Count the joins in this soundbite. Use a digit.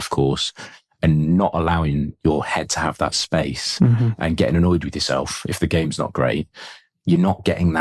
1